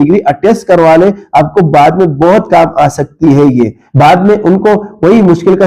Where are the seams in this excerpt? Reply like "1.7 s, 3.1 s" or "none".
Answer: 3.8 s